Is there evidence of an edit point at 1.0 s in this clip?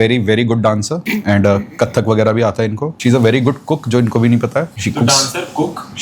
yes; 3 cuts; at 1.0 s, 2.9 s, 4.7 s

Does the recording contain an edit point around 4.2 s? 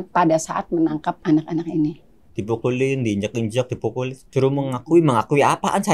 yes; 3 cuts; at 1.2 s, 2.3 s, 4.2 s

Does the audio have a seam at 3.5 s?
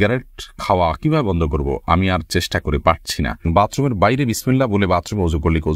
yes; 1 cut; at 3.5 s

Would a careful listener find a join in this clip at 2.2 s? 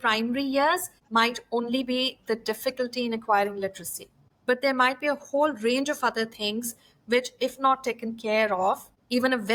no; 0 cuts

